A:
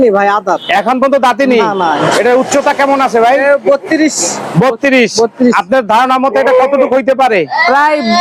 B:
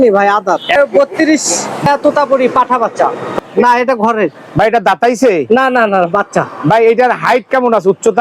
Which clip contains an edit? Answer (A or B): B